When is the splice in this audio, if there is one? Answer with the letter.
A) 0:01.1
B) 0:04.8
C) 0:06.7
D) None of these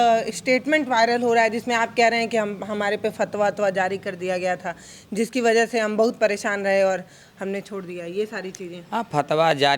D